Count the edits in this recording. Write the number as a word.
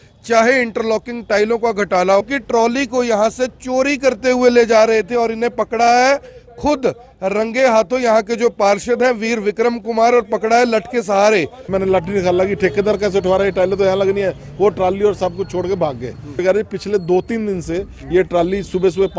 three